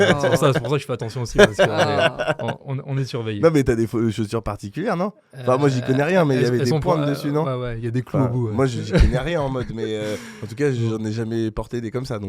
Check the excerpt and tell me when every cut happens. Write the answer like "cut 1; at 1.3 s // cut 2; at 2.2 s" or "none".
none